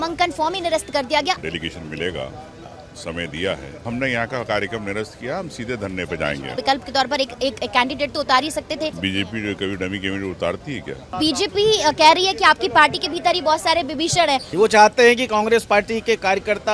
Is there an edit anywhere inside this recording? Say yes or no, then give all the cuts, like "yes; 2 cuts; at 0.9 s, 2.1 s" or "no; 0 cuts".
yes; 6 cuts; at 1.4 s, 3.9 s, 6.5 s, 9.0 s, 11.1 s, 14.5 s